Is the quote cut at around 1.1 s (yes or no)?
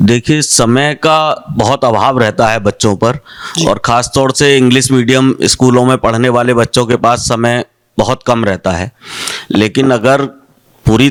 no